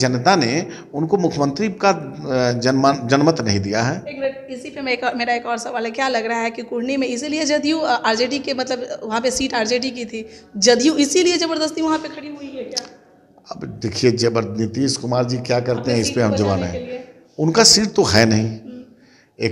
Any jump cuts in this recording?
no; 0 cuts

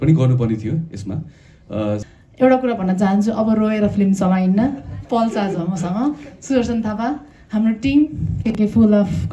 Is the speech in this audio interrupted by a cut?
yes; 2 cuts; at 2.0 s, 8.5 s

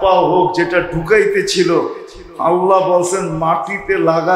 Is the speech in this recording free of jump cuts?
yes; 0 cuts

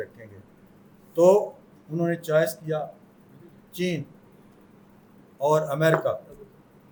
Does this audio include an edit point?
no; 0 cuts

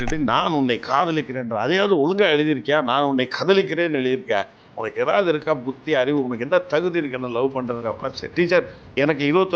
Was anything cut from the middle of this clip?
no; 0 cuts

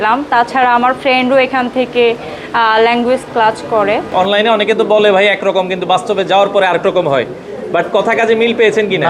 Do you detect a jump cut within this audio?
yes; 1 cut; at 4.1 s

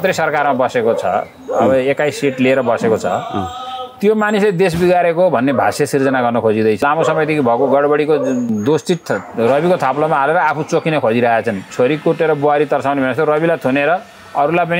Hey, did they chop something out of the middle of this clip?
yes; 3 cuts; at 6.8 s, 8.5 s, 11.7 s

